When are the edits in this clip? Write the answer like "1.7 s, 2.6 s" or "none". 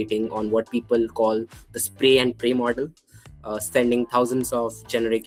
none